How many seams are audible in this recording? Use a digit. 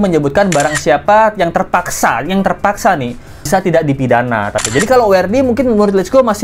2